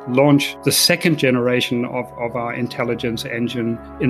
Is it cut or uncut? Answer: uncut